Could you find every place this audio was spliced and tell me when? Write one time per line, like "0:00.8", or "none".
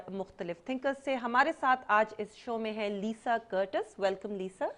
none